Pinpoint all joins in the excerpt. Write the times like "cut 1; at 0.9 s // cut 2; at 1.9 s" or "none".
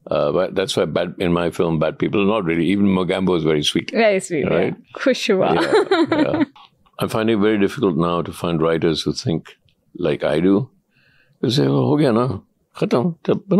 cut 1; at 6.6 s